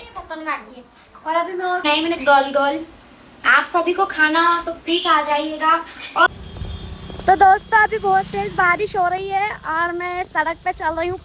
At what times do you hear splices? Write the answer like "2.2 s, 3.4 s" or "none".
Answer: 1.9 s, 6.3 s